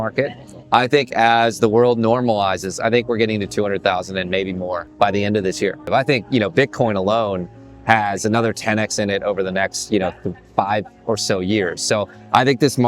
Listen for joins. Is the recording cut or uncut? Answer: cut